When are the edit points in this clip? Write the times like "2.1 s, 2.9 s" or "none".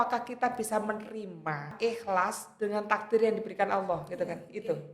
1.7 s